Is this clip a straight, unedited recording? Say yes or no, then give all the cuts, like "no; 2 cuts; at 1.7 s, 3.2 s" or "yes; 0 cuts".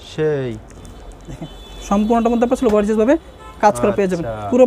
yes; 0 cuts